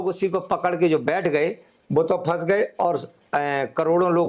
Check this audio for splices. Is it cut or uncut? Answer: uncut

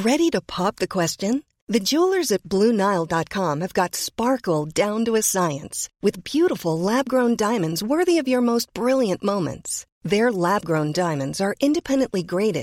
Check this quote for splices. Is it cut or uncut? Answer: uncut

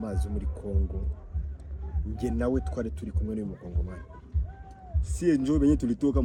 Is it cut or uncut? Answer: uncut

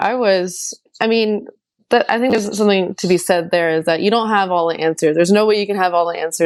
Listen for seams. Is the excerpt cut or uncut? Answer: uncut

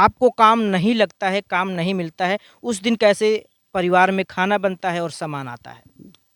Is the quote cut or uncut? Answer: uncut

